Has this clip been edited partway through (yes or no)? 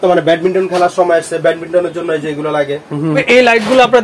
no